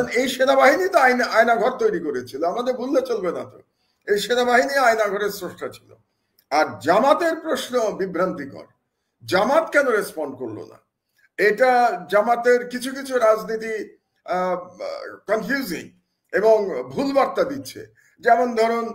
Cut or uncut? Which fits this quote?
uncut